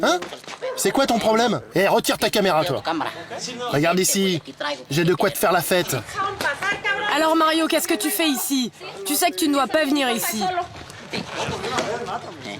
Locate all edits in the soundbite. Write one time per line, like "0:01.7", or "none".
0:01.6
0:03.5
0:06.1
0:11.1